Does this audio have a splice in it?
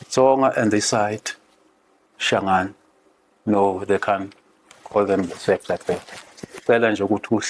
no; 0 cuts

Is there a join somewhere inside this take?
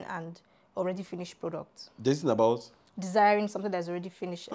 no; 0 cuts

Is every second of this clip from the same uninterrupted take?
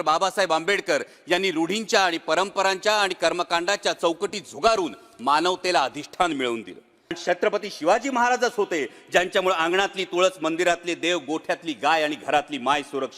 no; 1 cut; at 7.2 s

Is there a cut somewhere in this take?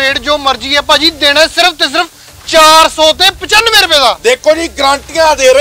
no; 0 cuts

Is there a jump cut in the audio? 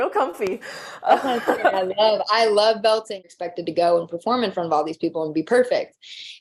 yes; 1 cut; at 3.4 s

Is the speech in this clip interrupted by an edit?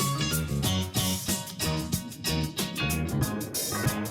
no; 0 cuts

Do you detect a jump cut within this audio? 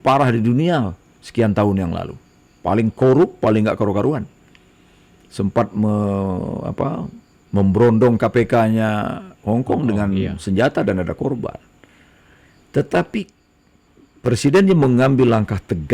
no; 0 cuts

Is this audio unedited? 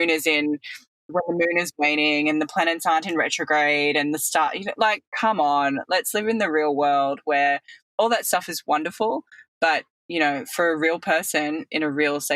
no; 1 cut; at 1.0 s

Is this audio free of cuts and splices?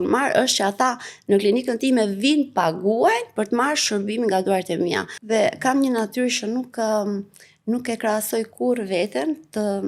no; 1 cut; at 5.1 s

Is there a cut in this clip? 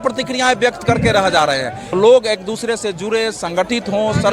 yes; 1 cut; at 1.8 s

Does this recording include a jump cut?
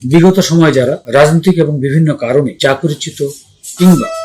yes; 2 cuts; at 1.0 s, 2.5 s

